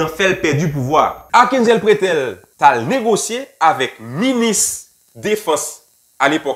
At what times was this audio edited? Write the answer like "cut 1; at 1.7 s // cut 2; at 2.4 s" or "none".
cut 1; at 1.2 s // cut 2; at 2.4 s